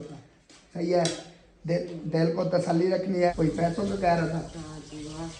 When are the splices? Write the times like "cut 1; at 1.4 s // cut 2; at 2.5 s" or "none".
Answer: cut 1; at 3.3 s